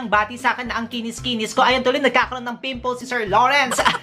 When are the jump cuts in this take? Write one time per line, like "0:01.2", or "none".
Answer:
none

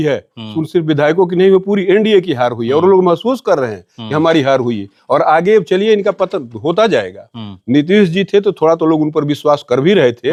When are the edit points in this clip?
none

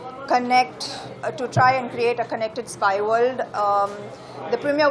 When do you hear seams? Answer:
none

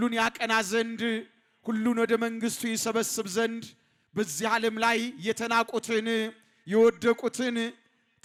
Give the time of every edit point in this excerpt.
none

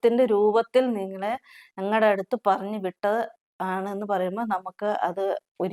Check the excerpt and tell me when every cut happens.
none

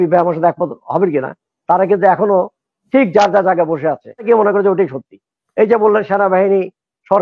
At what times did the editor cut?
0:04.2

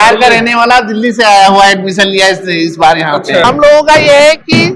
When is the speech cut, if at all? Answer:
0:03.4

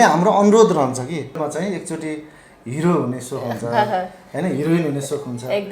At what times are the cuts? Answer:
0:01.4

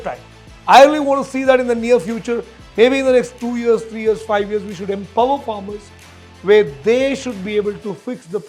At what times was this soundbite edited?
none

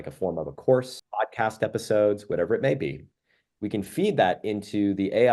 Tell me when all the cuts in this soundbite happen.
0:01.0

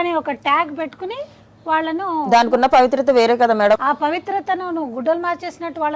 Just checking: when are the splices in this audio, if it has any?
0:03.8

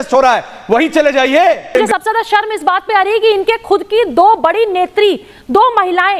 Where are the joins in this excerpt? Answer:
0:01.7

